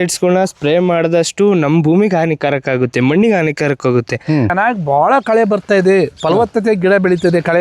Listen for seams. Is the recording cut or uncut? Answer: cut